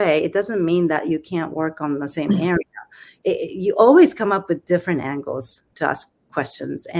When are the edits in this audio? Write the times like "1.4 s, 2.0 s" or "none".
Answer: 3.1 s